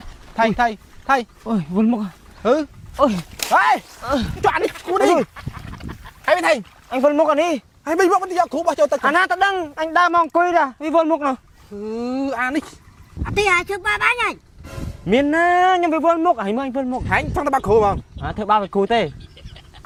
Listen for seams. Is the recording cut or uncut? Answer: uncut